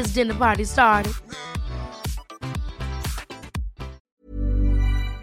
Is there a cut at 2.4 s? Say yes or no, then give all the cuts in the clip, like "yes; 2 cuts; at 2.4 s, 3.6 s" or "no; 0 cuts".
no; 1 cut; at 4.0 s